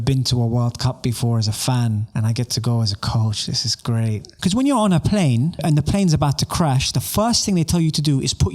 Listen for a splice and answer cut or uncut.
cut